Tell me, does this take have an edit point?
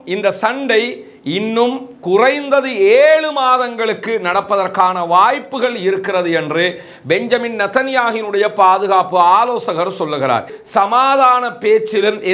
yes; 1 cut; at 10.6 s

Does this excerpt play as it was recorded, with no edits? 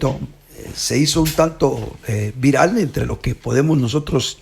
yes; 0 cuts

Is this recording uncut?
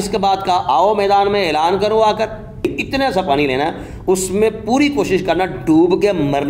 no; 1 cut; at 2.8 s

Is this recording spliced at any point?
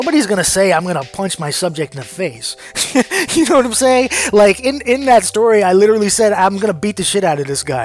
no; 0 cuts

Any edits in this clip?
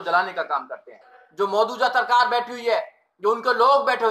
yes; 1 cut; at 1.2 s

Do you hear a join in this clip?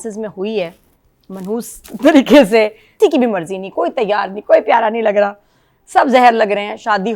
yes; 1 cut; at 3.0 s

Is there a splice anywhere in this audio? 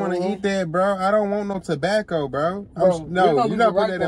no; 0 cuts

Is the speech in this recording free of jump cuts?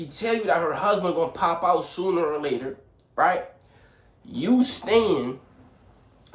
yes; 0 cuts

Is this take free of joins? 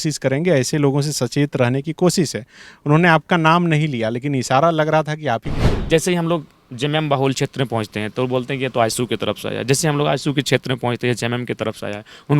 no; 1 cut; at 5.7 s

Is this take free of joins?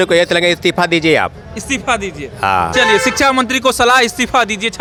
yes; 0 cuts

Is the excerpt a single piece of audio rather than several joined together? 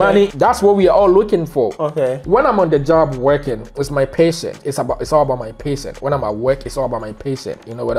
yes; 0 cuts

